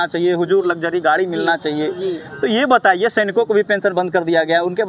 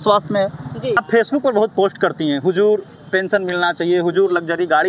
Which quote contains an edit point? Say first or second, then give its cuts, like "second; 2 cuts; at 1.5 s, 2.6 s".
second; 1 cut; at 1.0 s